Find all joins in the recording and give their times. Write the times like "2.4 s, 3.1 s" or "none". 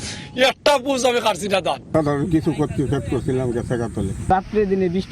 none